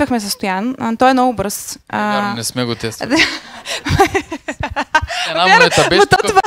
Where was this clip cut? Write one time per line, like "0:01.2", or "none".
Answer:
none